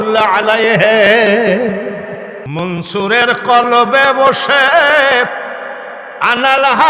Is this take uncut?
no; 1 cut; at 2.5 s

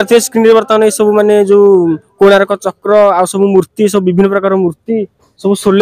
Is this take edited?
no; 0 cuts

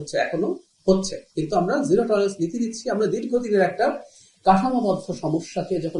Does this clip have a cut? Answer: no; 0 cuts

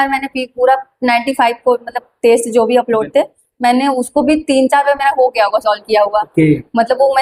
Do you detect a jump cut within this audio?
no; 0 cuts

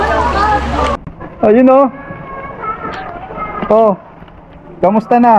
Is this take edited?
yes; 1 cut; at 1.0 s

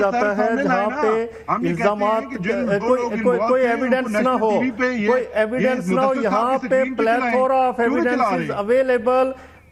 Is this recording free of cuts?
yes; 0 cuts

